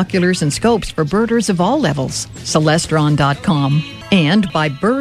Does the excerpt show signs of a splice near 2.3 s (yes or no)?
no